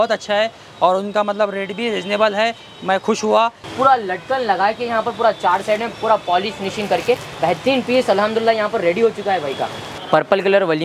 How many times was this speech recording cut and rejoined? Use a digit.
2